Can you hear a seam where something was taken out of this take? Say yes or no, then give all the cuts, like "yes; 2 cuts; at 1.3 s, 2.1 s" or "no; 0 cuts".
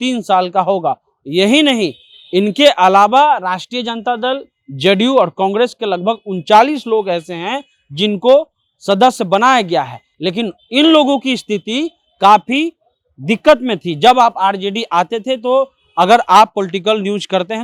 no; 0 cuts